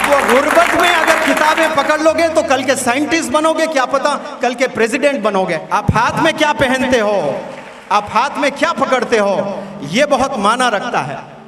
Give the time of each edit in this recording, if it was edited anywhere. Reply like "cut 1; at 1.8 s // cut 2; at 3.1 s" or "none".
cut 1; at 5.6 s